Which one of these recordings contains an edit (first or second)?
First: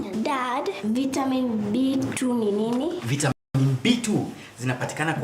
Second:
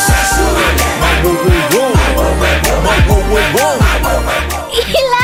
first